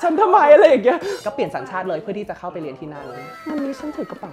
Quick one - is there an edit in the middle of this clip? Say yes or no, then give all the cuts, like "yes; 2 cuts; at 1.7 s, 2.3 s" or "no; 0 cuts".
yes; 2 cuts; at 1.1 s, 3.3 s